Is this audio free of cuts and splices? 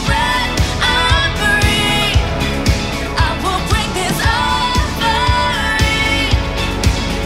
yes; 0 cuts

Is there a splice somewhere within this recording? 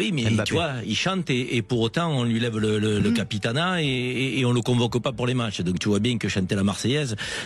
no; 0 cuts

